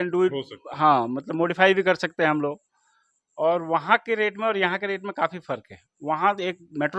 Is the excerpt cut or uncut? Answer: uncut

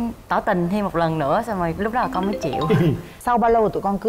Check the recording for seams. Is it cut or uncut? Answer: cut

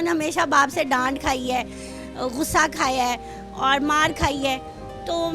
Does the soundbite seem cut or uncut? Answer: uncut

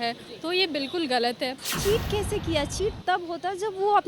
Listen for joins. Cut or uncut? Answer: cut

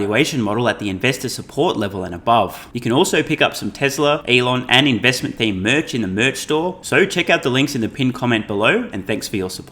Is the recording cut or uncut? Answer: cut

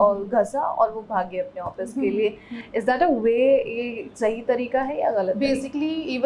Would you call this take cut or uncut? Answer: uncut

